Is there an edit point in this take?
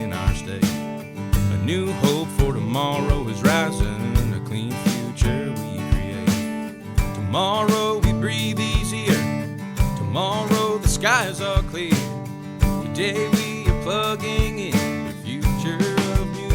no; 0 cuts

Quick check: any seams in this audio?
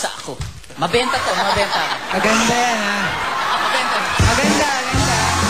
no; 0 cuts

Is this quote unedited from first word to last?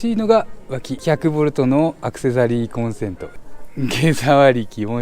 no; 2 cuts; at 1.0 s, 3.4 s

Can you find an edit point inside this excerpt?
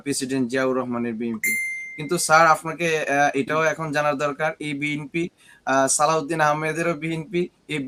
no; 0 cuts

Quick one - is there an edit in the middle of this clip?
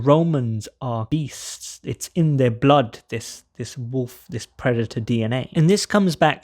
yes; 1 cut; at 1.1 s

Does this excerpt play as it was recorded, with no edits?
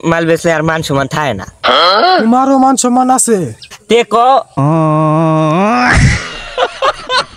yes; 0 cuts

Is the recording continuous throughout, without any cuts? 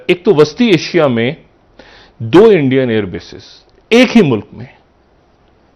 yes; 0 cuts

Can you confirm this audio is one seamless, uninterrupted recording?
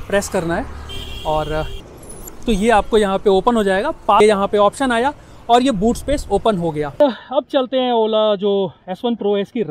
no; 3 cuts; at 2.0 s, 4.2 s, 7.0 s

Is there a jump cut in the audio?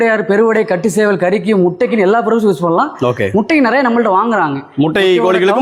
no; 0 cuts

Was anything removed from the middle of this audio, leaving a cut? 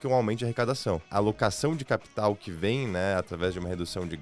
yes; 1 cut; at 1.1 s

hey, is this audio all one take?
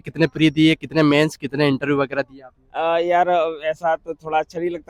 yes; 0 cuts

